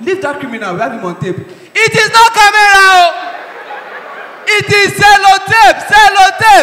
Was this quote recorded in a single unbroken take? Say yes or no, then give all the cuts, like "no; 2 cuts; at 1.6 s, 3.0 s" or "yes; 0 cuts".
yes; 0 cuts